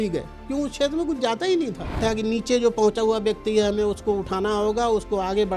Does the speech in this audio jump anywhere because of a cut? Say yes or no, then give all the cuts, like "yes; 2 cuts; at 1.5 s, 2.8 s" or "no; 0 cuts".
yes; 1 cut; at 2.0 s